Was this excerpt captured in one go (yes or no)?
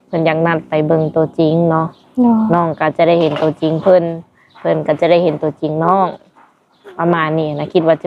yes